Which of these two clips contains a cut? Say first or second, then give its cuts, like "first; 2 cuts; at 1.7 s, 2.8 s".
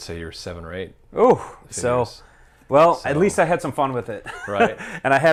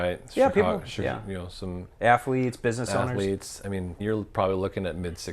second; 1 cut; at 4.0 s